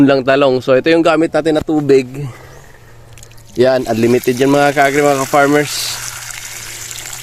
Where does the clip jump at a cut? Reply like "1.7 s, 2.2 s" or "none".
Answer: none